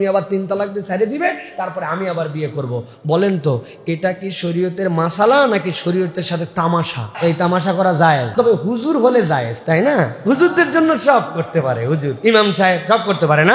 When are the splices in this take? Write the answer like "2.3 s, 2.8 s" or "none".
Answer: 7.0 s, 8.3 s